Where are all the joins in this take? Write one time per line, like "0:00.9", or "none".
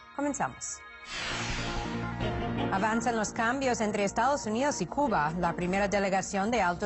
0:05.3